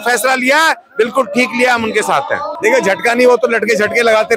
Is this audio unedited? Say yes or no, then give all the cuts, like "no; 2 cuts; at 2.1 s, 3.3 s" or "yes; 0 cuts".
no; 1 cut; at 2.5 s